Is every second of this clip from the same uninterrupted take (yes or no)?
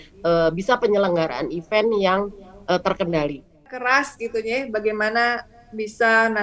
no